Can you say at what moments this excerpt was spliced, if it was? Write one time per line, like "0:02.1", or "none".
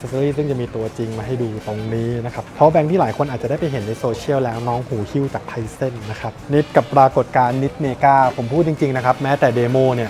0:02.4
0:06.3